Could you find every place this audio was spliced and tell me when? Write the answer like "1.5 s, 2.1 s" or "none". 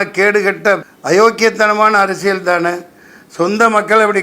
0.9 s